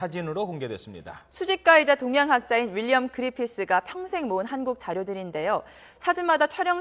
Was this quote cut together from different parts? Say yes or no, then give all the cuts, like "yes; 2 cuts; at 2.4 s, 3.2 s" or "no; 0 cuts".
yes; 1 cut; at 5.3 s